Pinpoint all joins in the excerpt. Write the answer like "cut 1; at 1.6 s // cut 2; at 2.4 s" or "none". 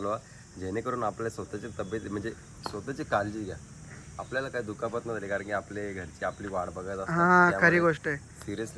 none